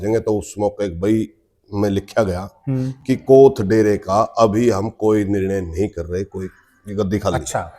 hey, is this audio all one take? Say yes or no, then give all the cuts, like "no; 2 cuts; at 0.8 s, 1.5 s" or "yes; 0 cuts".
yes; 0 cuts